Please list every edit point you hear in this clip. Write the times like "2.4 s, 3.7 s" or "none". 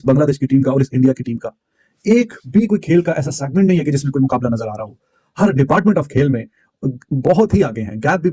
none